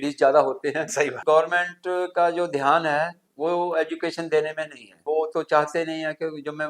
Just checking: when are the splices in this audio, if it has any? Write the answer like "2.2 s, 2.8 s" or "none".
1.2 s, 5.0 s